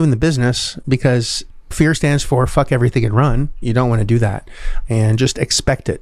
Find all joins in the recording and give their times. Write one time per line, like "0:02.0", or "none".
0:01.7
0:03.6
0:04.7